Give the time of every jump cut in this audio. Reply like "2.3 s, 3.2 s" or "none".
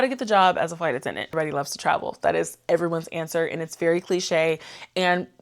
1.3 s